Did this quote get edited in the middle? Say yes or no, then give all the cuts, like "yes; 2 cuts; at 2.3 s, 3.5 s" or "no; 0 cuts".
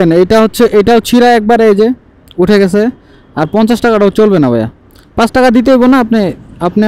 no; 0 cuts